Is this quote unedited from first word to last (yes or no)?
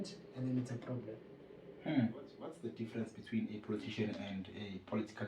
no